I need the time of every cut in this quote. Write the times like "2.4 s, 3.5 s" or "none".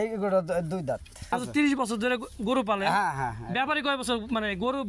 1.3 s